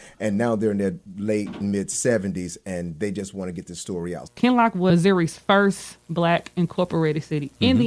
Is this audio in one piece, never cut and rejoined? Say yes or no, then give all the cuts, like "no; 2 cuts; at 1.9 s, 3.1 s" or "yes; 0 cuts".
no; 1 cut; at 4.2 s